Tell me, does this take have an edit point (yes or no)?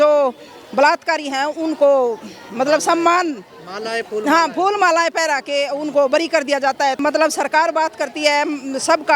yes